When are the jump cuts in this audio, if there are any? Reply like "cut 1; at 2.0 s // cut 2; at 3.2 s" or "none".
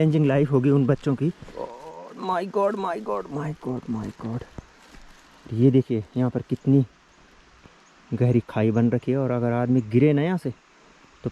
cut 1; at 1.8 s